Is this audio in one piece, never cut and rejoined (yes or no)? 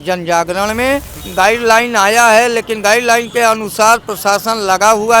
no